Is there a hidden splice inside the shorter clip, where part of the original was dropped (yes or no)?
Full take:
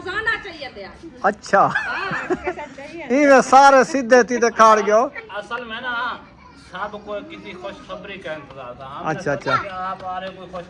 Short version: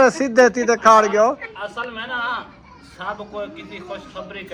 no